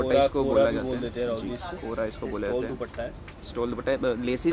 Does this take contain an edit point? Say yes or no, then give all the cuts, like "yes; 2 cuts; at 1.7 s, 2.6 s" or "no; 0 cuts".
no; 0 cuts